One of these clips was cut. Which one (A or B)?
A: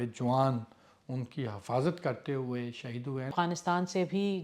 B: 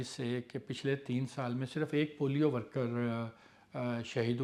A